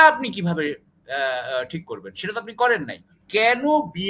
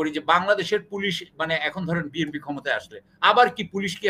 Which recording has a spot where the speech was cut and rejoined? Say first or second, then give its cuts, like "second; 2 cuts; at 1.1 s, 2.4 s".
first; 1 cut; at 3.1 s